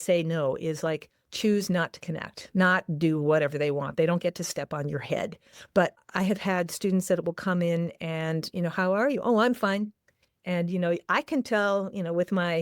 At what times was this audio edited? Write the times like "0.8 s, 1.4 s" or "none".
6.0 s